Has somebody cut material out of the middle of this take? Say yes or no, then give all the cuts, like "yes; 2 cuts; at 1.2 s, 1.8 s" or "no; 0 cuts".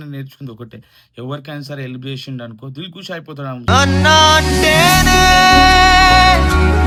no; 0 cuts